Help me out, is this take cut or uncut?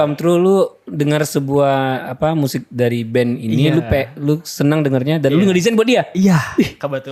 uncut